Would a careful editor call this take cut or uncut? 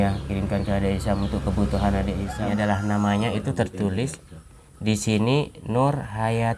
cut